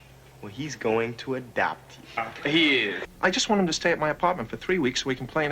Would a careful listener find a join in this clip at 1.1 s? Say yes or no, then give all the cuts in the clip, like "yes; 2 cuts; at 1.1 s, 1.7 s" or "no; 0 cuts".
no; 2 cuts; at 2.3 s, 3.0 s